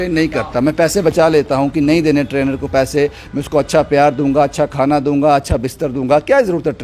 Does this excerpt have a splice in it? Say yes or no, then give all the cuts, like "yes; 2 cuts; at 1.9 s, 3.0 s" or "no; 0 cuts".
no; 0 cuts